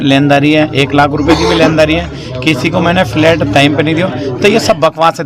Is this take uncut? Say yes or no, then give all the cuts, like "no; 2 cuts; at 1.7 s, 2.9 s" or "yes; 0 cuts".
yes; 0 cuts